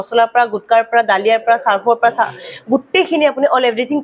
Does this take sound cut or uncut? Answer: uncut